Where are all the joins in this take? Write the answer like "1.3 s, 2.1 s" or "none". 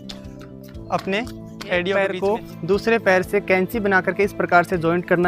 2.1 s